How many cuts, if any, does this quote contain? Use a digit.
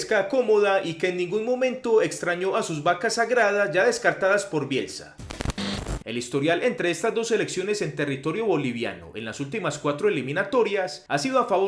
1